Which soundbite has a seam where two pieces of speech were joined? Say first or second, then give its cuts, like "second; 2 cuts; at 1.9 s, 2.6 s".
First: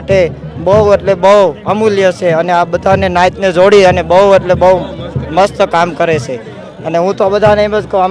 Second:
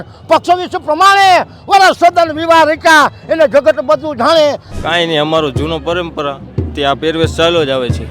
second; 1 cut; at 4.7 s